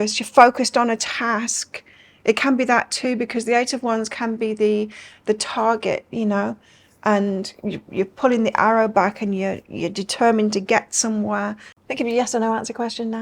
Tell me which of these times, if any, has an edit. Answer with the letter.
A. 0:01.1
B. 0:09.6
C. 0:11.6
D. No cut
C